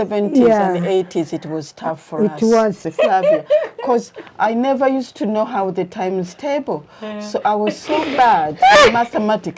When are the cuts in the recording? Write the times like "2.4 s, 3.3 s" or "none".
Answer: 2.8 s